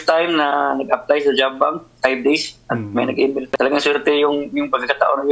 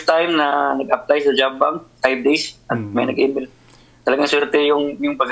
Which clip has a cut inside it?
first; 1 cut; at 3.5 s

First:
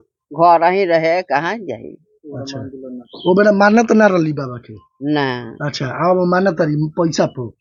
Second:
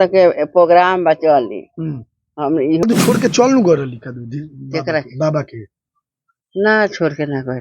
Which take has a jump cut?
second; 1 cut; at 2.8 s

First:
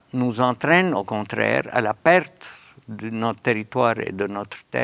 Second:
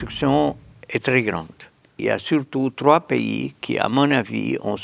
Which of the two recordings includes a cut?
second; 1 cut; at 1.9 s

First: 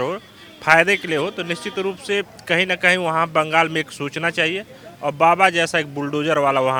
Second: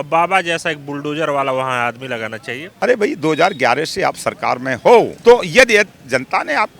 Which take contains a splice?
second; 2 cuts; at 2.6 s, 5.1 s

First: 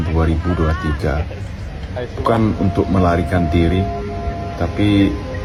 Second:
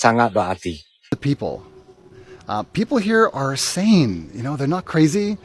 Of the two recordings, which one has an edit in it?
second; 1 cut; at 1.2 s

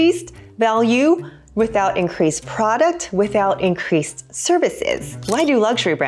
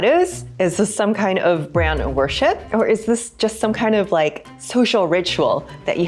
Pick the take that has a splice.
first; 1 cut; at 5.1 s

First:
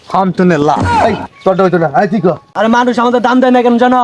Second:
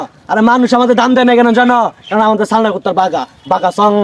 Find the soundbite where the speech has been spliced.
first; 2 cuts; at 1.0 s, 2.5 s

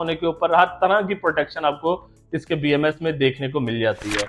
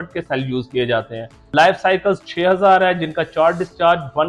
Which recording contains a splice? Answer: second; 1 cut; at 1.3 s

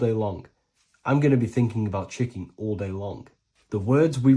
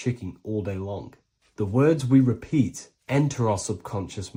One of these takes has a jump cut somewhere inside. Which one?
first; 1 cut; at 1.2 s

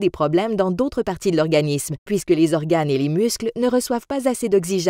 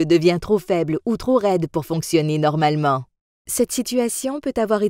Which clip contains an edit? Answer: first; 1 cut; at 1.7 s

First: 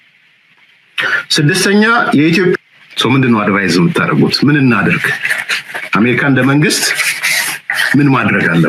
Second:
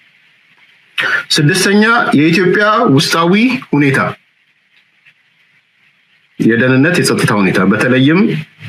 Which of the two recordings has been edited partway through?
first; 1 cut; at 2.6 s

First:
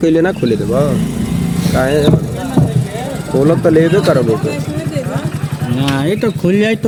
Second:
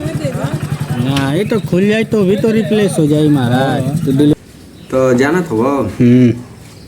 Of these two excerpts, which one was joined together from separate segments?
second; 1 cut; at 4.3 s

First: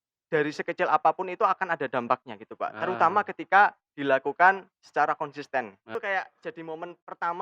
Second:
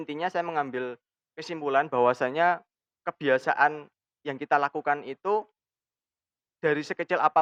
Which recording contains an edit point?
first; 1 cut; at 5.9 s

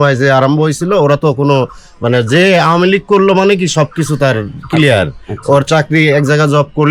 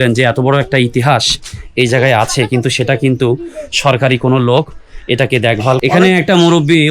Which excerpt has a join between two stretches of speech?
second; 1 cut; at 5.8 s

